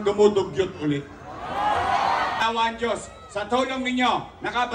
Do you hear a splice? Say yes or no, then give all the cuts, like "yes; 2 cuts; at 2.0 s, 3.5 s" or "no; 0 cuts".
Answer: yes; 1 cut; at 2.4 s